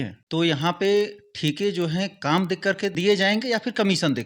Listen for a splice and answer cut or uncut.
uncut